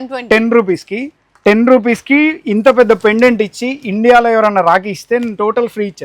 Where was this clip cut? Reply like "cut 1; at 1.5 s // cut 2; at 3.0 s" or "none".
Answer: none